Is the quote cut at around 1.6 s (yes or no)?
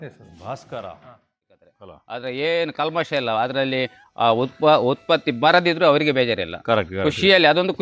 yes